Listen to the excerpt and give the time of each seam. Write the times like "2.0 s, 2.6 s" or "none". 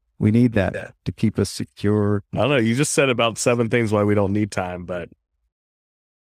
none